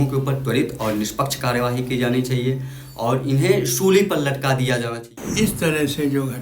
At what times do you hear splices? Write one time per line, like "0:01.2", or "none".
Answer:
0:05.2

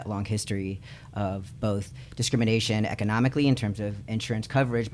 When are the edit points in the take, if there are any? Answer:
none

